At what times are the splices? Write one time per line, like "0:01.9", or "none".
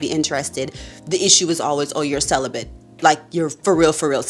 none